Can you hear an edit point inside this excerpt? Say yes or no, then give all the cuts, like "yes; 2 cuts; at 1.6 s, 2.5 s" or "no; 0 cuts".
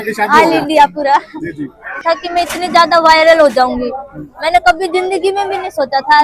yes; 1 cut; at 2.0 s